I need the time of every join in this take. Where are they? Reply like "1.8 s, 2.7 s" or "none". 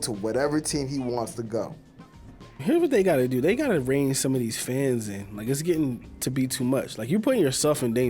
2.5 s